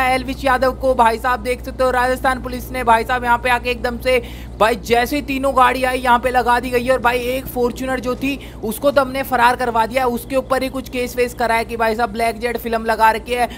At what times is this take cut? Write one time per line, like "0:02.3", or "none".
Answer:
none